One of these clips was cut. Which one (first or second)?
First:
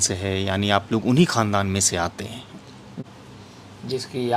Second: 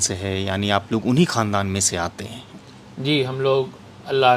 first